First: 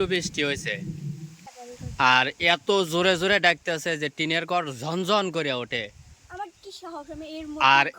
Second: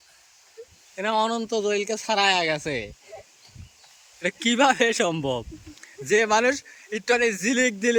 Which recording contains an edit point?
first; 1 cut; at 1.5 s

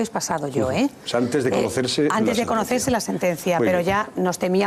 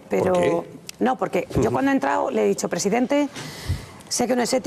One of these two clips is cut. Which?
first; 1 cut; at 1.2 s

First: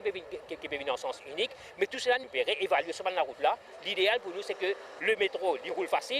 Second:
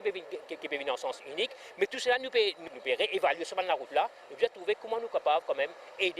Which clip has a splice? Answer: first; 3 cuts; at 2.2 s, 3.7 s, 4.9 s

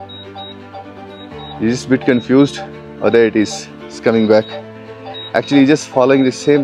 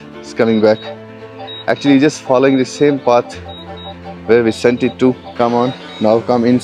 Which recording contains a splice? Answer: second; 1 cut; at 5.3 s

